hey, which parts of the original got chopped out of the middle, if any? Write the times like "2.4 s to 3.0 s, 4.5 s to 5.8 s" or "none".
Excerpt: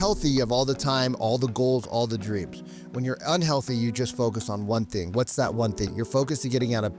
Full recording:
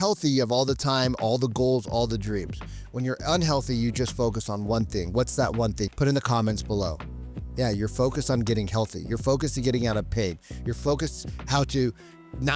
5.9 s to 9.0 s